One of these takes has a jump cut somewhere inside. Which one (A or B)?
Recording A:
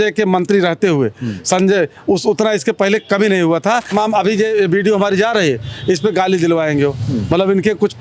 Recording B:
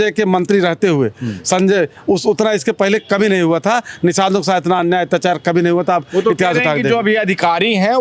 A